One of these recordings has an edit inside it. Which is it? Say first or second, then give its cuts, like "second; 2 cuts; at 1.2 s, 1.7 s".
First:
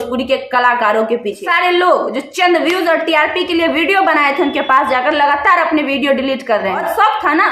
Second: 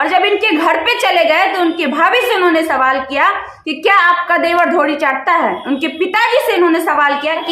first; 2 cuts; at 1.4 s, 6.8 s